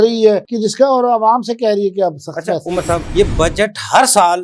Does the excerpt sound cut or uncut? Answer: cut